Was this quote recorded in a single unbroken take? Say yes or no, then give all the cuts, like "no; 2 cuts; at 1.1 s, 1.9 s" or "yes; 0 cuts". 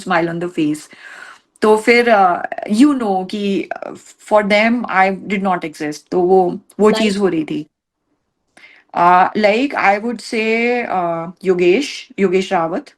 yes; 0 cuts